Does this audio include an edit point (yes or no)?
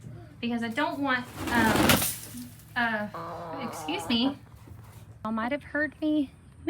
yes